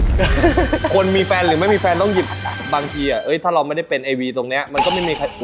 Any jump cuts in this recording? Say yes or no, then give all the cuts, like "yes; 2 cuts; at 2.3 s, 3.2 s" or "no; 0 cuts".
yes; 1 cut; at 2.7 s